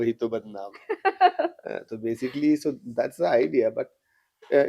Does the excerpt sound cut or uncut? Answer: uncut